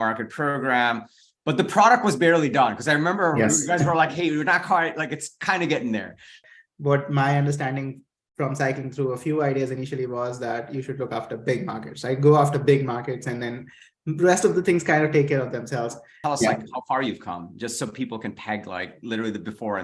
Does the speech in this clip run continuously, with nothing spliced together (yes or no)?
no